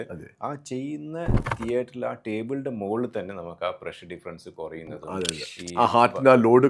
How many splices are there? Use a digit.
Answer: 0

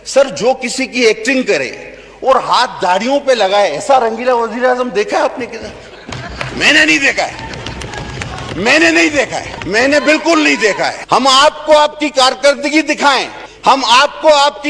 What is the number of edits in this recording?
1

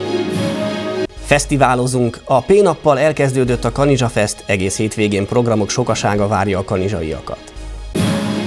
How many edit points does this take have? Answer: 1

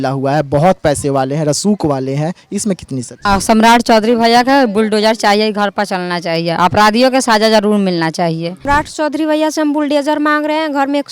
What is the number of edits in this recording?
2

